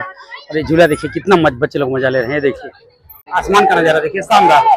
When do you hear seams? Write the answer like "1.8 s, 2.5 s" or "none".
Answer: 3.3 s